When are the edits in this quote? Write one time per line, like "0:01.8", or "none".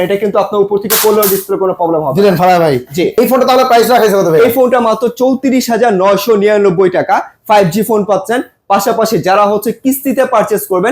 0:03.1